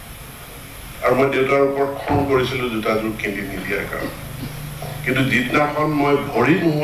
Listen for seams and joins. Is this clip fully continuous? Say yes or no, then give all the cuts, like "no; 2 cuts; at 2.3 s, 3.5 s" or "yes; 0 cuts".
yes; 0 cuts